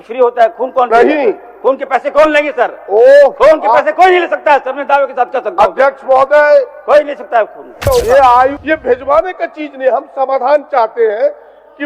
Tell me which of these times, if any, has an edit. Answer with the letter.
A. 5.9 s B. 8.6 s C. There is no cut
B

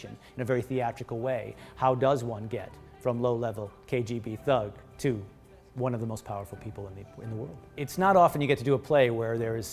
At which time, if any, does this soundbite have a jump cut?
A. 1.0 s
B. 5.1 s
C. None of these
C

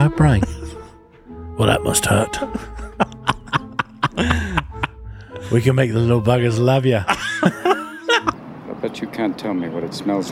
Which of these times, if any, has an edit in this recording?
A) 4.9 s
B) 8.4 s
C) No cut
B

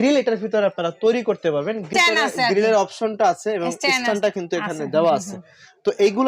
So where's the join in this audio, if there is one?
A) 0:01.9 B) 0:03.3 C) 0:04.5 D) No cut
A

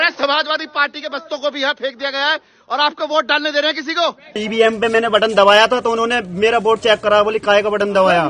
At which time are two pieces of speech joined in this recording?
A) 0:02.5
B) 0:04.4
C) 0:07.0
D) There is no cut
B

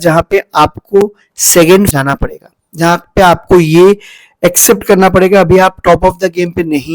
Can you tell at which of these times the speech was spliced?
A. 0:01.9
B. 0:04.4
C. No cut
A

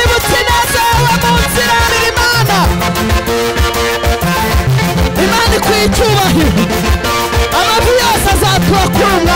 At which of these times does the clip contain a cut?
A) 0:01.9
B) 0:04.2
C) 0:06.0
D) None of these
A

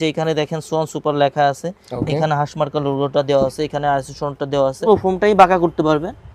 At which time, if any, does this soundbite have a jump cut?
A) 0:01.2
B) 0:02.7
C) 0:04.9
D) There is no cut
C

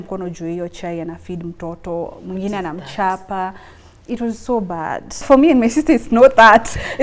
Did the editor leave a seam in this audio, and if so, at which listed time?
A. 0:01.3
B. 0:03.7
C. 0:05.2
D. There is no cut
C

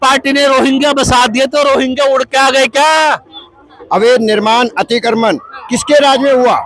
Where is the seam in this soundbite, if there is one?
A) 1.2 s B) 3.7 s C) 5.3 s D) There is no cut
B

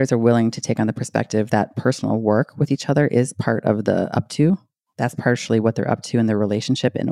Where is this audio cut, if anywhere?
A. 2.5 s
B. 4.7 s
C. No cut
C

